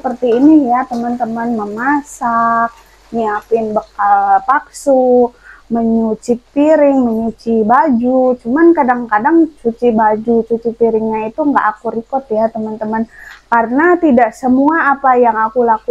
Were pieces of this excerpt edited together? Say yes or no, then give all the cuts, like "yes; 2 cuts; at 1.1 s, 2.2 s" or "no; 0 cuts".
no; 0 cuts